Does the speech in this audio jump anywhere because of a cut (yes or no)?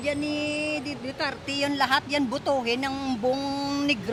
no